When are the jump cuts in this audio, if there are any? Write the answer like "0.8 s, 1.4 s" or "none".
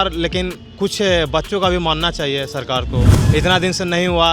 3.2 s